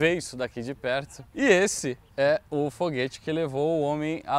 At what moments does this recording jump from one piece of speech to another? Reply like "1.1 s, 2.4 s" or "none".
1.2 s